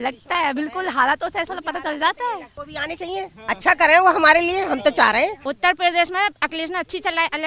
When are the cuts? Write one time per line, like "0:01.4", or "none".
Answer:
0:02.7
0:05.4